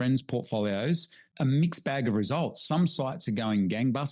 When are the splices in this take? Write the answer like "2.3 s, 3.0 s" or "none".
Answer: 1.3 s